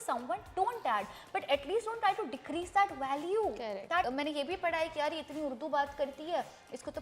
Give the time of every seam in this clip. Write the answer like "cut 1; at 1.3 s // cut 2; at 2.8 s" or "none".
cut 1; at 4.1 s